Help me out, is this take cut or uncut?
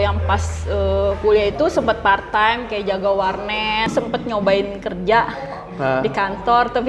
cut